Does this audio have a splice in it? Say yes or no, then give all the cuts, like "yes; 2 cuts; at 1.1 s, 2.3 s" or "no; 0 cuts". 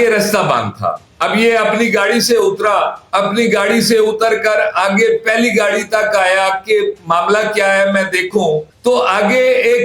no; 0 cuts